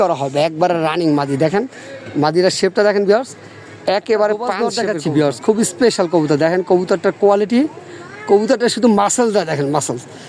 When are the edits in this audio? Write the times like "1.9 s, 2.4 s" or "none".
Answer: 4.8 s